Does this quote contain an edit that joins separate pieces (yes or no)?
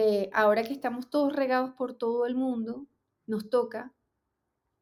no